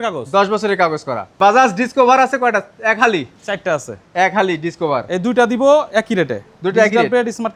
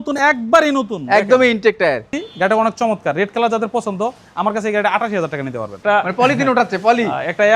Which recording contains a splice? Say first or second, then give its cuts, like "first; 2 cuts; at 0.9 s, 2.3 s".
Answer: second; 2 cuts; at 2.2 s, 5.7 s